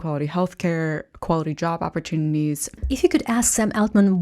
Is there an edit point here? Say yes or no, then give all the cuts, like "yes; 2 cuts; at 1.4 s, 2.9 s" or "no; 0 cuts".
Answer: yes; 1 cut; at 2.7 s